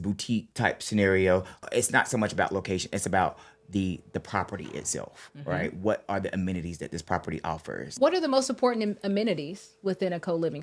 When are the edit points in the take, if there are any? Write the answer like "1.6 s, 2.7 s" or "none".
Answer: 1.6 s, 7.9 s

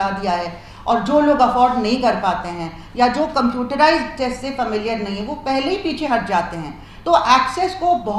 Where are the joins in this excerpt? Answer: none

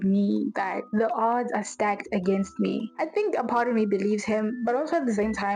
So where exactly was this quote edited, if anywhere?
0.9 s, 2.9 s

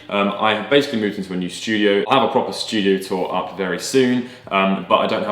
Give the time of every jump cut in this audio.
2.1 s

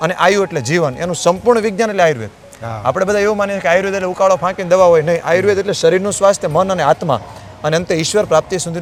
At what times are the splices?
none

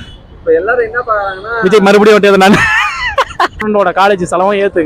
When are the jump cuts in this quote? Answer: 3.6 s

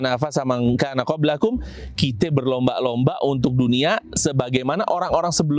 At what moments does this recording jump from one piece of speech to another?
none

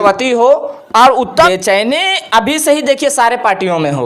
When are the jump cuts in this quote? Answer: 1.3 s

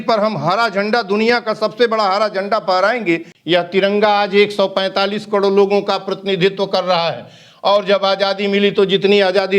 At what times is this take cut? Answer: 3.3 s

